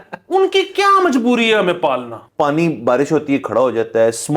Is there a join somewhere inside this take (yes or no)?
yes